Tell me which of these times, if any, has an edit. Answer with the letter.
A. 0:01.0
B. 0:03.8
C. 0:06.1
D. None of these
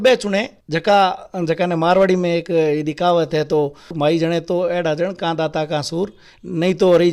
D